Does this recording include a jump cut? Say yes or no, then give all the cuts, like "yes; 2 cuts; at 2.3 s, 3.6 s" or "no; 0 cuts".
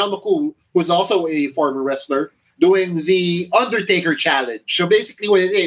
no; 0 cuts